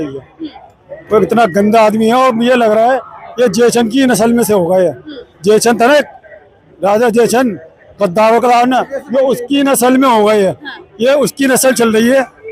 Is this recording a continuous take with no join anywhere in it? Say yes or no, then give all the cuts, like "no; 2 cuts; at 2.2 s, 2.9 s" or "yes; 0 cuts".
yes; 0 cuts